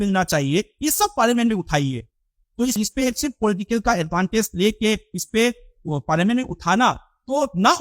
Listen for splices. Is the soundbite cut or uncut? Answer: cut